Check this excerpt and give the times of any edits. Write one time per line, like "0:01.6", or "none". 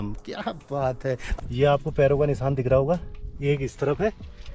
0:01.3